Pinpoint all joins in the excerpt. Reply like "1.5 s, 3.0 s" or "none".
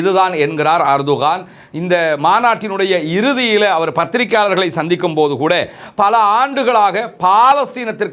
none

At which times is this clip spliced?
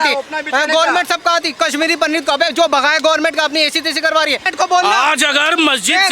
4.5 s

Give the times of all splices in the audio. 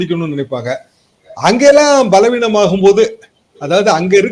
none

